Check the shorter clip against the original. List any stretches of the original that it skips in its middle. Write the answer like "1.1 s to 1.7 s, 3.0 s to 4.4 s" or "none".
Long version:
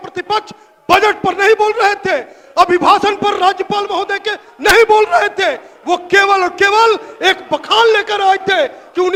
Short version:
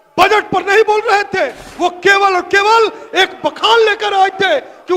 2.4 s to 5.7 s